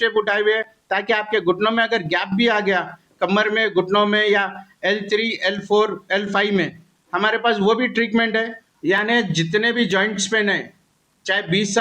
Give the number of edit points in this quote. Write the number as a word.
one